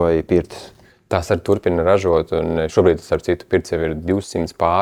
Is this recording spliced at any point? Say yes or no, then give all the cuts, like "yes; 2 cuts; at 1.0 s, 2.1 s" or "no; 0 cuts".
no; 0 cuts